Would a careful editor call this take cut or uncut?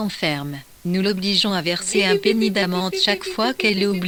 uncut